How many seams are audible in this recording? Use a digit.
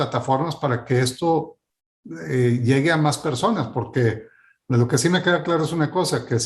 0